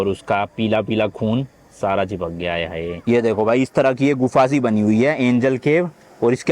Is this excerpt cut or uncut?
cut